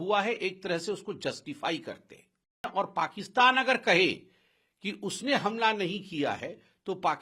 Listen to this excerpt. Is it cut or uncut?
cut